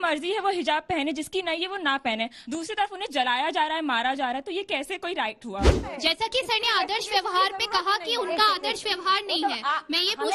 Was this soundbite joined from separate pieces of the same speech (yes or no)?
yes